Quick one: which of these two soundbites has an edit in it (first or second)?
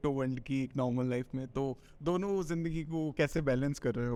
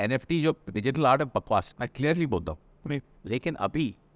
second